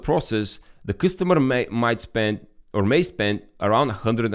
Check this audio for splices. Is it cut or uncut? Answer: uncut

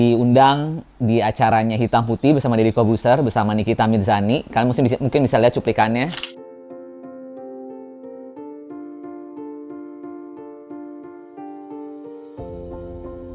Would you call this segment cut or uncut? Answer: uncut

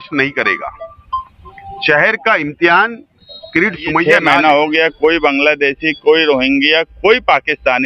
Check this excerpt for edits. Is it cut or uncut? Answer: cut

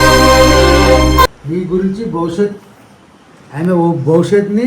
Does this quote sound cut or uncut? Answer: cut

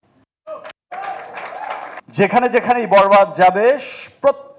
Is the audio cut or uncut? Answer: cut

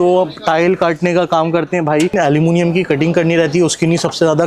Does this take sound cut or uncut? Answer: cut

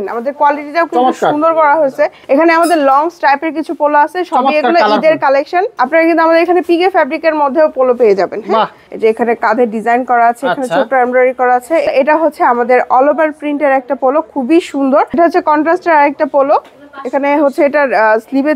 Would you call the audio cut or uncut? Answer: cut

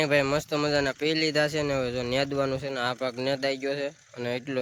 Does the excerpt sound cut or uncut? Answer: uncut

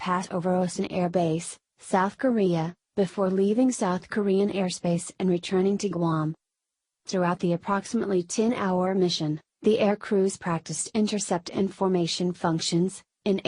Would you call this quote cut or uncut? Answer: uncut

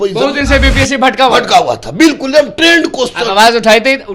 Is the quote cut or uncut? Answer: uncut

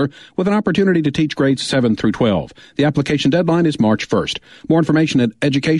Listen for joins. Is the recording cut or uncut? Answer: uncut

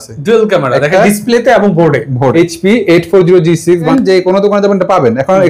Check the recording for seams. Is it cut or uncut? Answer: cut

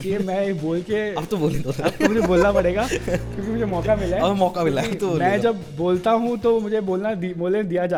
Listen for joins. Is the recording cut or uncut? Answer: uncut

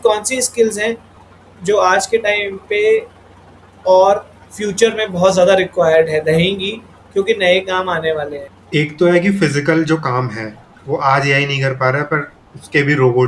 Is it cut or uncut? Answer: uncut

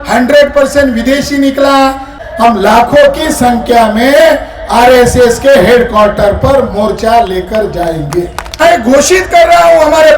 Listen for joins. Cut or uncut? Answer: cut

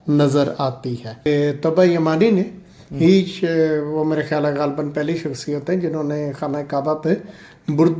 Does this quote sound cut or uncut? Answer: cut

